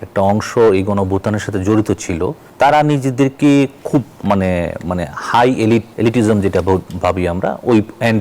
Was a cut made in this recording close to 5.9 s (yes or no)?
yes